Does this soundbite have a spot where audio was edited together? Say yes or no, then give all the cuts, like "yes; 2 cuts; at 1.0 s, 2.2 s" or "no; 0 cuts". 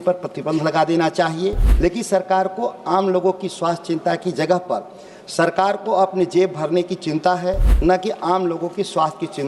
yes; 2 cuts; at 1.7 s, 7.7 s